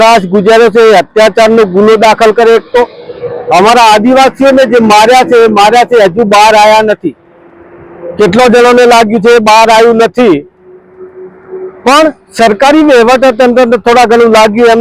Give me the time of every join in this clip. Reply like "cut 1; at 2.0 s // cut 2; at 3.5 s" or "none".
none